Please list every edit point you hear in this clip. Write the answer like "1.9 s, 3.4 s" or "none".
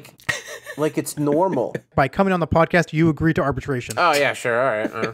1.9 s, 3.9 s